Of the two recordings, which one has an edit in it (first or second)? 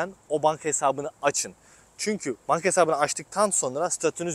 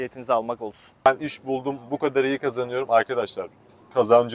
second